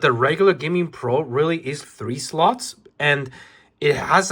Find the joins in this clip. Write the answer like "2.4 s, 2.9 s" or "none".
1.8 s